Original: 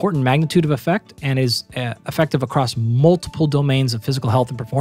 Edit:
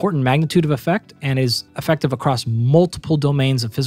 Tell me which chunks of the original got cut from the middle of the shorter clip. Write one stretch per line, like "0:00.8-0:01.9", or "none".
0:01.7-0:02.0